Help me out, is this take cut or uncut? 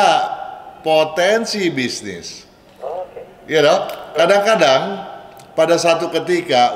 uncut